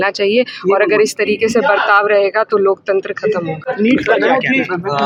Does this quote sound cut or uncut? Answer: uncut